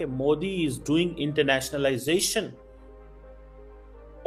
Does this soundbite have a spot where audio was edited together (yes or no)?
no